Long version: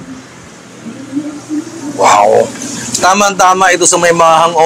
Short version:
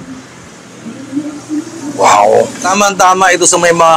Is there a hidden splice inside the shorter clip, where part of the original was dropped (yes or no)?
yes